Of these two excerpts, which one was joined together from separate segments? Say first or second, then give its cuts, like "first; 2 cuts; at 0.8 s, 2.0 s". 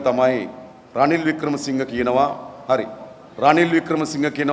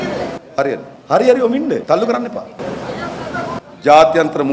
second; 3 cuts; at 0.9 s, 1.8 s, 2.6 s